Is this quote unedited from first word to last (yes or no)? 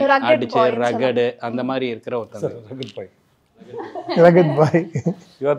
yes